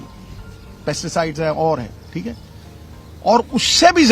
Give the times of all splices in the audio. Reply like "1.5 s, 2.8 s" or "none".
2.5 s